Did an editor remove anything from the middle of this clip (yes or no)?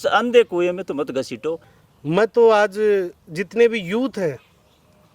yes